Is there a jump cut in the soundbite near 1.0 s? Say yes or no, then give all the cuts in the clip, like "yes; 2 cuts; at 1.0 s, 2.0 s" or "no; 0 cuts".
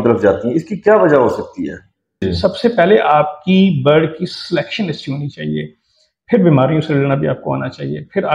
no; 1 cut; at 2.3 s